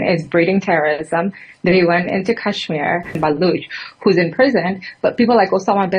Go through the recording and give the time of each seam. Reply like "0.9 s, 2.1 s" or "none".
3.2 s

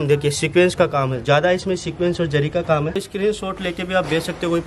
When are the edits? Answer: 3.1 s

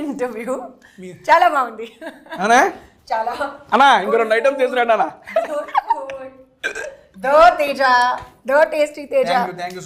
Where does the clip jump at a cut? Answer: none

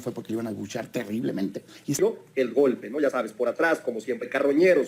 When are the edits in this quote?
2.0 s

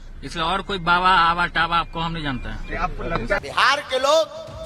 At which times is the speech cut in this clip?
3.4 s

